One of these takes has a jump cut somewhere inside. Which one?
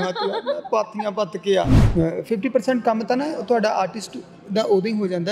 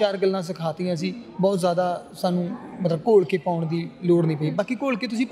first; 1 cut; at 1.8 s

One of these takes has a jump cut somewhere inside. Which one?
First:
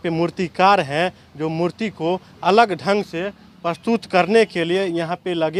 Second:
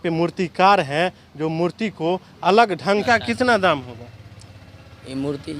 second; 1 cut; at 3.0 s

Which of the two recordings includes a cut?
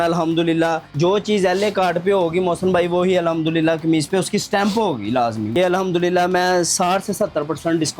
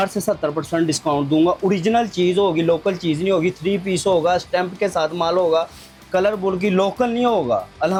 first; 2 cuts; at 0.9 s, 5.6 s

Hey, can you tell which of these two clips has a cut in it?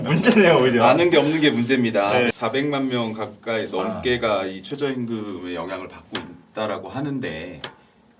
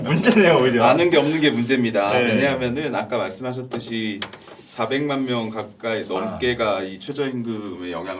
first; 1 cut; at 2.3 s

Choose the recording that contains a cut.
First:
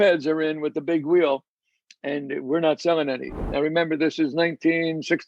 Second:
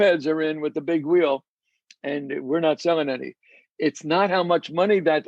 first; 1 cut; at 3.4 s

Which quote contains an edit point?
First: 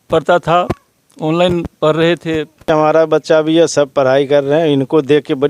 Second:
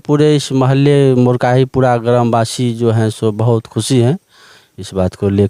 first; 1 cut; at 2.7 s

